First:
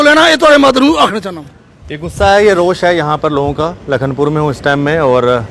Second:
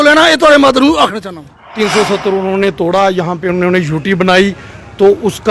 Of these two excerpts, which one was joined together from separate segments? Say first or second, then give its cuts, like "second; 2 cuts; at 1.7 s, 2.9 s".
second; 1 cut; at 1.6 s